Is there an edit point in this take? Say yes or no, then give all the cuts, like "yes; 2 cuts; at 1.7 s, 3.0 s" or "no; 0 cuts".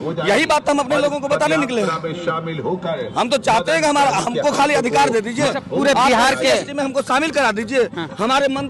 no; 0 cuts